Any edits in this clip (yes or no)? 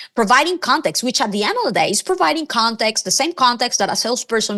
no